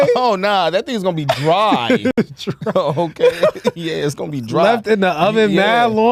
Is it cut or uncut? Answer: uncut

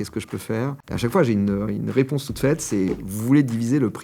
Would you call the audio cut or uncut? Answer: uncut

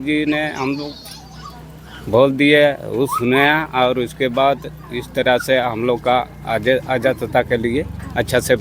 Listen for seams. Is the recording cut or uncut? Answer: uncut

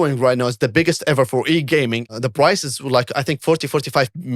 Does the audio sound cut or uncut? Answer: cut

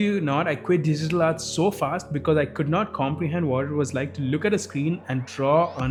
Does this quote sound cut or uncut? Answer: uncut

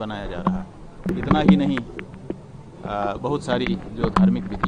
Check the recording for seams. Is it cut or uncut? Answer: cut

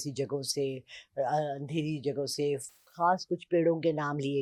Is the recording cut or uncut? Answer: uncut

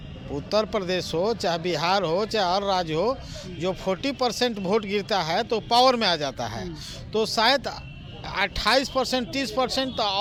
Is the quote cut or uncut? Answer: uncut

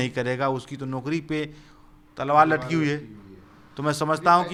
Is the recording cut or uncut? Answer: uncut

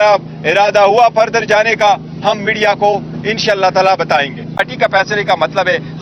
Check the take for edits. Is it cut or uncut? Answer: cut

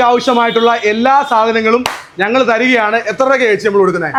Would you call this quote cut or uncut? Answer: uncut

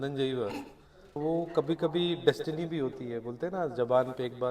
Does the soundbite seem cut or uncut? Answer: cut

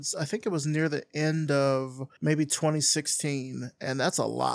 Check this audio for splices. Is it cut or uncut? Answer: cut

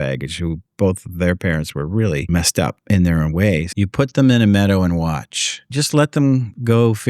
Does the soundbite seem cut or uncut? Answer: cut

